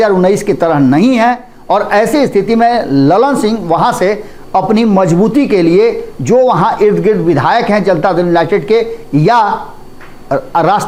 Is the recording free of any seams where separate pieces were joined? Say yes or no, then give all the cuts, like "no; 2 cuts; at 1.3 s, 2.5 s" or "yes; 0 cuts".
yes; 0 cuts